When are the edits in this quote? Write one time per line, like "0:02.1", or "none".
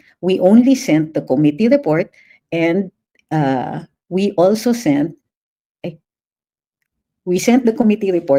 none